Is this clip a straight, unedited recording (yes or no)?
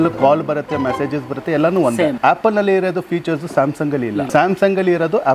no